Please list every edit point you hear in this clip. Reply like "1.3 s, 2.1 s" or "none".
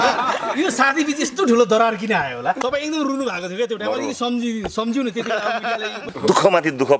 2.6 s, 6.0 s